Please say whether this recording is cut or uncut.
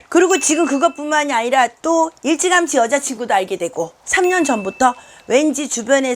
cut